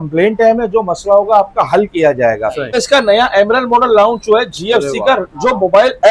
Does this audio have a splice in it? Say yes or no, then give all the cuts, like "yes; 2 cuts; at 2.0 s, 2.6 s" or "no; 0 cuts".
yes; 1 cut; at 2.8 s